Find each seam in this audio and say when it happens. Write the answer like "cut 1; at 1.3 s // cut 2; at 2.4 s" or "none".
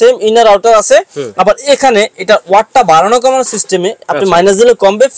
none